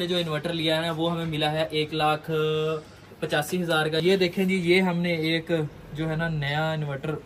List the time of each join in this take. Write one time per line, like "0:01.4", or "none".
0:04.0